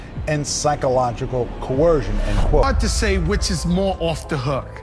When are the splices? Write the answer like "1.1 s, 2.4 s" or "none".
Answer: 2.7 s